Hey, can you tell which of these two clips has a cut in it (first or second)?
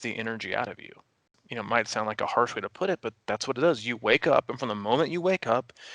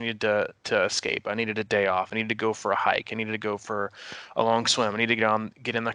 first